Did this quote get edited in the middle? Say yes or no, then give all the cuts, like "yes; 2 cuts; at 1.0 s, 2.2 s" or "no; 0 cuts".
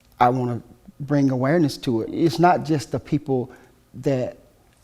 yes; 1 cut; at 2.1 s